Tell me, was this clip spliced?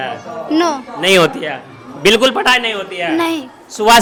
no; 0 cuts

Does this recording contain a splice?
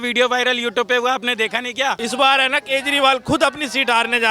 yes; 1 cut; at 2.0 s

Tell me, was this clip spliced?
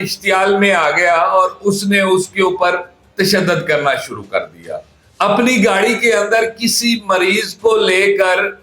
yes; 1 cut; at 5.0 s

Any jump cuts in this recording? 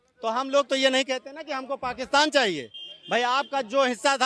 no; 0 cuts

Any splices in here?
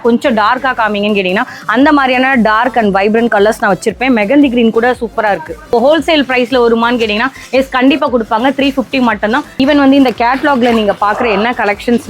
yes; 2 cuts; at 5.7 s, 9.5 s

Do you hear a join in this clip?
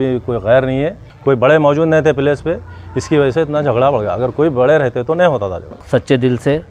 yes; 2 cuts; at 1.1 s, 5.7 s

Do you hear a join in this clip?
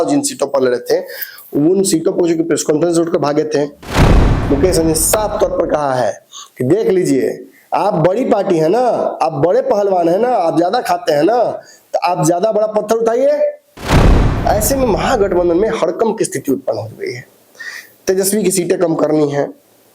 yes; 2 cuts; at 4.2 s, 14.0 s

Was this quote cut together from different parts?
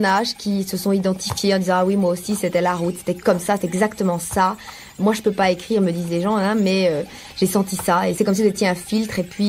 yes; 3 cuts; at 3.2 s, 5.0 s, 8.1 s

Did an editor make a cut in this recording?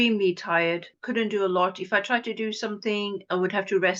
yes; 1 cut; at 1.0 s

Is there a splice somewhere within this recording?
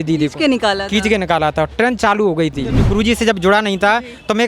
yes; 1 cut; at 2.8 s

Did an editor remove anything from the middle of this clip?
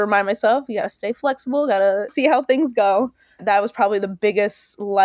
yes; 2 cuts; at 2.1 s, 3.4 s

